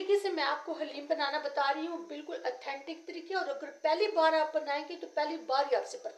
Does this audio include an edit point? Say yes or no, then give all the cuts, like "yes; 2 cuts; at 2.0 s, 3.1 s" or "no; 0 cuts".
no; 0 cuts